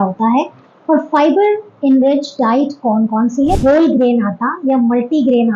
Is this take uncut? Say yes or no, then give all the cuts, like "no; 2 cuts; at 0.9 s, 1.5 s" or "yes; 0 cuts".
no; 1 cut; at 3.6 s